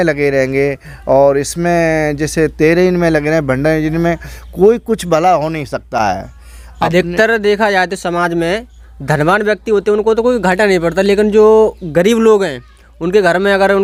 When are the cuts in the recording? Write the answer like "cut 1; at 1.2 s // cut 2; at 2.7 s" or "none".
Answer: none